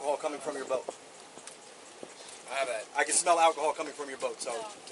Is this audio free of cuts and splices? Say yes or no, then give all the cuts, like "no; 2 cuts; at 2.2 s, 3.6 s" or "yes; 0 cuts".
yes; 0 cuts